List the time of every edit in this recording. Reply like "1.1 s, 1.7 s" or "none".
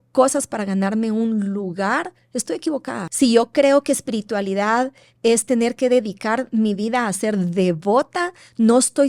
3.1 s